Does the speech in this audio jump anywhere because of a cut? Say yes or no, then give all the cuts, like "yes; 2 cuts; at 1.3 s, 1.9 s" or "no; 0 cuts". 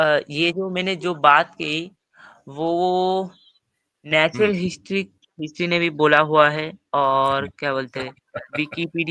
no; 0 cuts